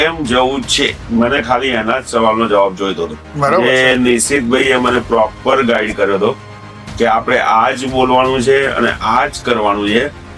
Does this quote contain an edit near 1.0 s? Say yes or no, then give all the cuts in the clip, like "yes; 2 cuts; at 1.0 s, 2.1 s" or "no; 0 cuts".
yes; 2 cuts; at 1.0 s, 3.2 s